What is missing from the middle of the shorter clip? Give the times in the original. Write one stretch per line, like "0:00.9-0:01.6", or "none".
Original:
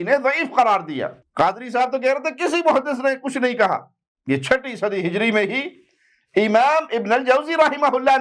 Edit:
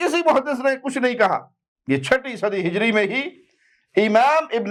none

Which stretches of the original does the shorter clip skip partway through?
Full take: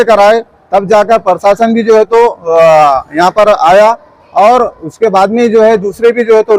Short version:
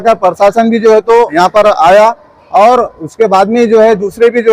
0:02.3-0:03.1

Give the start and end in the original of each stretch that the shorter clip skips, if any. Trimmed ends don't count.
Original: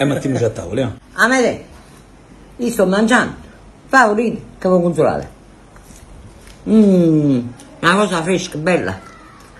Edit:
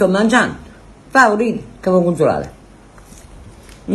none

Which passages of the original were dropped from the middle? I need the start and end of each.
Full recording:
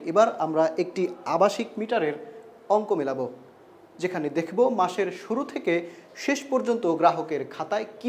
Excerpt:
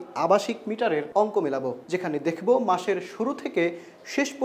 0:02.2-0:02.6
0:03.3-0:03.9

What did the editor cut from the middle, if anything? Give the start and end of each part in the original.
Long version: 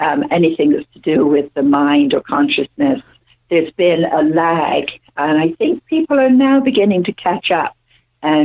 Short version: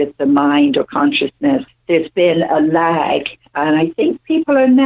0:03.1-0:03.4

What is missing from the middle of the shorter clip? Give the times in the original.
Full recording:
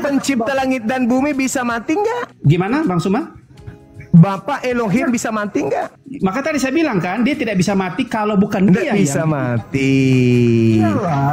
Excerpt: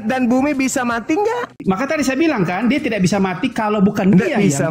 0:02.3-0:06.0

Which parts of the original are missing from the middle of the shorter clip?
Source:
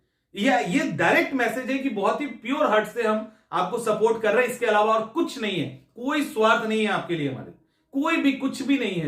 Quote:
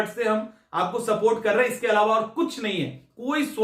none

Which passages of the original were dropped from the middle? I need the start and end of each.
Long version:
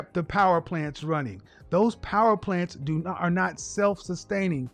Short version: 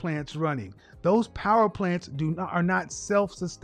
none

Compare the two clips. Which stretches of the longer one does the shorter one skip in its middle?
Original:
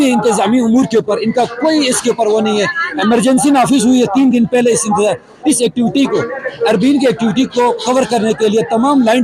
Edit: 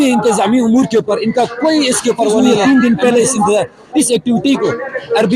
0:02.4-0:03.9

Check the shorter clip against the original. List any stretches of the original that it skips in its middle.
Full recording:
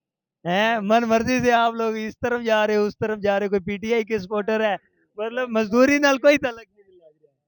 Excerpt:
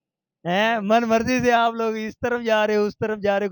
none

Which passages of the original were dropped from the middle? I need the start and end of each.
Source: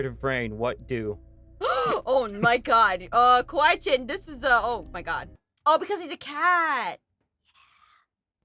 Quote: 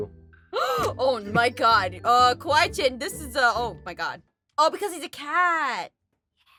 none

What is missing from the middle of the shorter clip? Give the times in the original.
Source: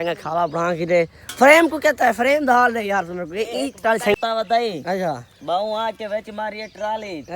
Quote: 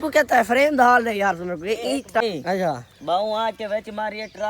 0:03.9-0:04.6

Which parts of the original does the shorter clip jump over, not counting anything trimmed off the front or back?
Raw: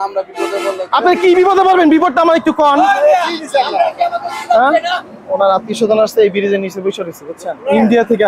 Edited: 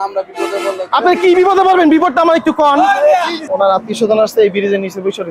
0:03.4-0:05.2

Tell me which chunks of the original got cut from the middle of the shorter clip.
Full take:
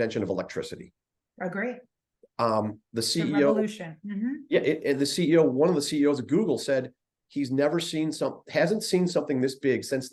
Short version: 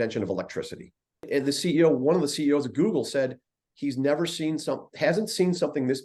0:01.3-0:04.8

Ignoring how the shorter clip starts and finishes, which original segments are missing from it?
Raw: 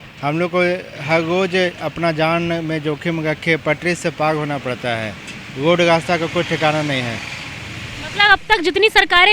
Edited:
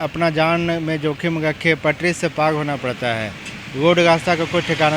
none

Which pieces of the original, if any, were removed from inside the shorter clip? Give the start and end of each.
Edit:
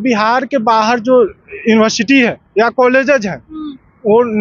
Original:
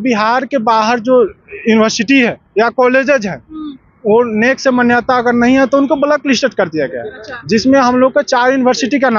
none

